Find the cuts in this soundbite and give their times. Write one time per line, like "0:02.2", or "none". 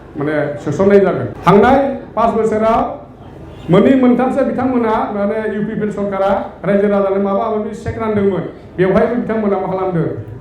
0:01.3

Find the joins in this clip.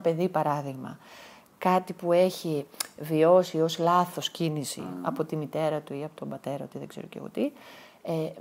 none

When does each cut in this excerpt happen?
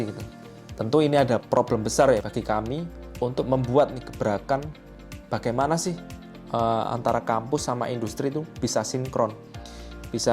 0:01.4
0:02.6

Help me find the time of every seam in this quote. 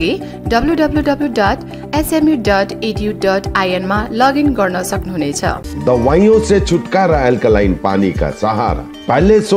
0:05.7

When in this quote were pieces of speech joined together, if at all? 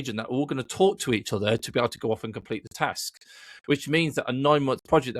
none

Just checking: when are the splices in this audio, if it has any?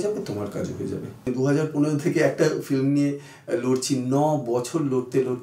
0:01.2

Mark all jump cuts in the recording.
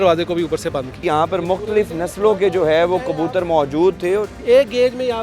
0:01.0
0:04.3

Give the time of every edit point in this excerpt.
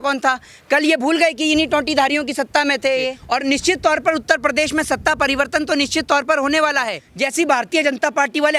0:03.2
0:07.0

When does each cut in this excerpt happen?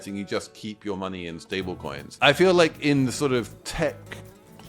0:02.0
0:03.6

